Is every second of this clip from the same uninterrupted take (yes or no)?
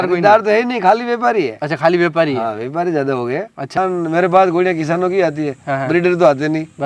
no